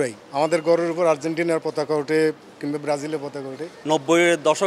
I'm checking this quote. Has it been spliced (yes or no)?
yes